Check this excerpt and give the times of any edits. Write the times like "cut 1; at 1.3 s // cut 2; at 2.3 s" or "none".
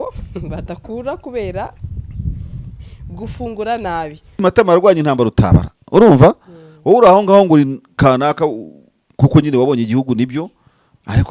cut 1; at 4.4 s